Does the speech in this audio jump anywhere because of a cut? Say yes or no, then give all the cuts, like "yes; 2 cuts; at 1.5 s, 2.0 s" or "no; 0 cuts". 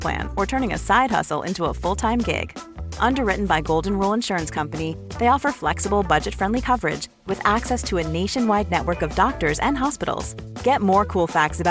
no; 0 cuts